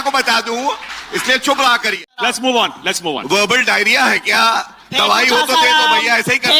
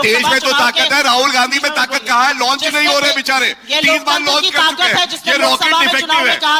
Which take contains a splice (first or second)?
first